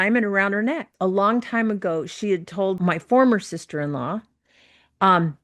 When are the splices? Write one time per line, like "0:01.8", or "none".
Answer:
0:00.9
0:02.8